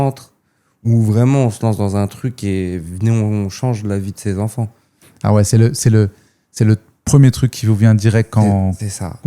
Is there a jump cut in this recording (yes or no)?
no